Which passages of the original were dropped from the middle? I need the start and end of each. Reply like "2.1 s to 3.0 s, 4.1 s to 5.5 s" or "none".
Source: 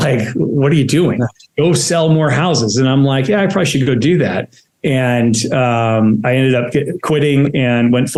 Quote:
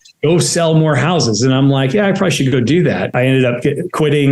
4.5 s to 6.2 s